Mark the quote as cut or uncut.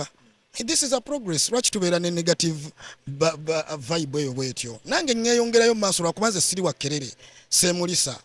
uncut